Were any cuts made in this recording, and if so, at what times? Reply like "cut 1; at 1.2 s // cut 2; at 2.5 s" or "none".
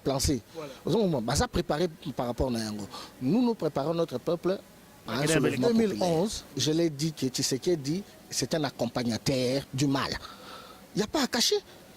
cut 1; at 5.6 s